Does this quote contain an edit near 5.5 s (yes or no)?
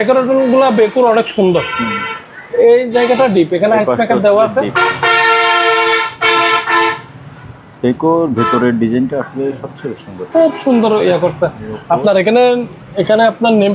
no